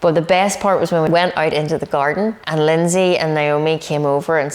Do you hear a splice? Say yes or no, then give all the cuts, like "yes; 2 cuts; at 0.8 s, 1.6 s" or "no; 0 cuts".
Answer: yes; 2 cuts; at 1.1 s, 2.4 s